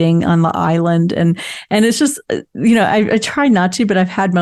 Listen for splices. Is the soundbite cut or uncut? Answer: uncut